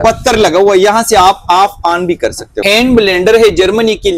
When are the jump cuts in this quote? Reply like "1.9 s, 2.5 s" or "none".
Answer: 2.5 s